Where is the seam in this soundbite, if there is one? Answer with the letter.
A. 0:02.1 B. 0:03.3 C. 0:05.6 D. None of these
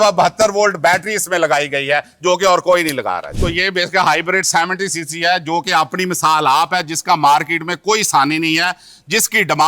B